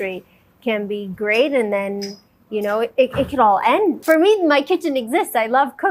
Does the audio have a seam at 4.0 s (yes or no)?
yes